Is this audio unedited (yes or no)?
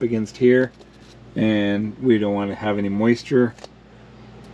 yes